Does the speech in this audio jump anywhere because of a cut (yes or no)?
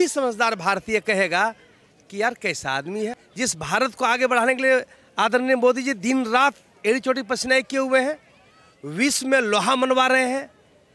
yes